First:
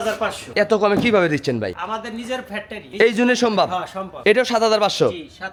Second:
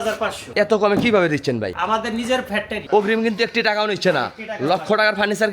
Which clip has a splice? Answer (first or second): second